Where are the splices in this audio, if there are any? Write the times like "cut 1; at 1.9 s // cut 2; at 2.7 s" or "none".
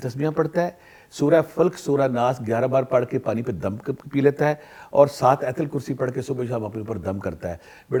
none